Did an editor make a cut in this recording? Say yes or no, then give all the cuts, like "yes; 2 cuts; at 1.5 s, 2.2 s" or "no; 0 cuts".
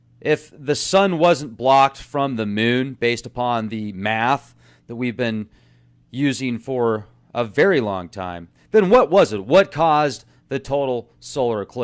yes; 1 cut; at 5.1 s